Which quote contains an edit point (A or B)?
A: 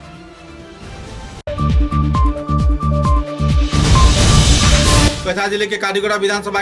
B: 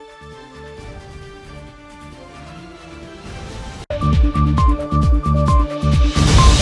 A